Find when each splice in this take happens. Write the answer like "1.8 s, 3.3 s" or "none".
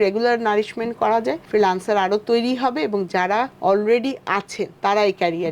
1.4 s, 3.5 s, 4.6 s